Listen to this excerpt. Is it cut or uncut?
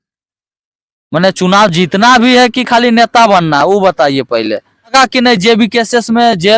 cut